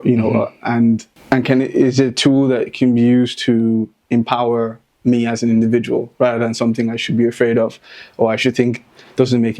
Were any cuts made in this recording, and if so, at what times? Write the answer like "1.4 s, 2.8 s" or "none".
none